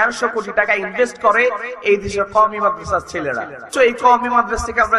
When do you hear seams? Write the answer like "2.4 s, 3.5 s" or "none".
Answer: 3.7 s

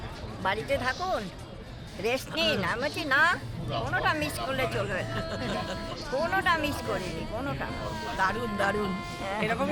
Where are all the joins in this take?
none

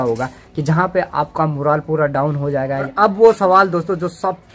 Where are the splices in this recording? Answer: 2.9 s

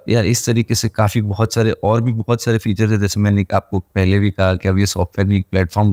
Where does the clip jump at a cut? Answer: none

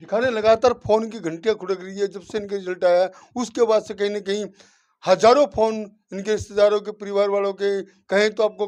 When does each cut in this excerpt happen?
none

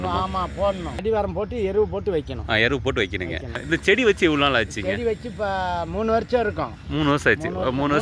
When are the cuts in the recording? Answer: 1.0 s, 3.6 s

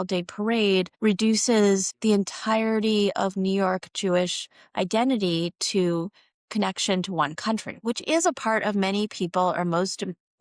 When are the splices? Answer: 0.9 s, 1.9 s

